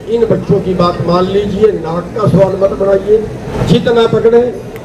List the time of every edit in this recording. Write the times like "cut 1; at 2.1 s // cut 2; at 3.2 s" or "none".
cut 1; at 3.5 s